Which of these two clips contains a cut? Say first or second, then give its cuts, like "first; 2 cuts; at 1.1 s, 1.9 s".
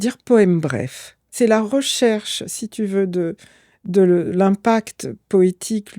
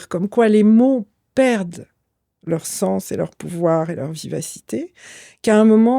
first; 1 cut; at 1.2 s